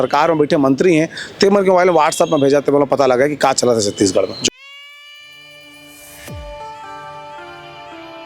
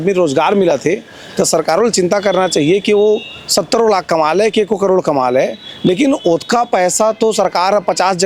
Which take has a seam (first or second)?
first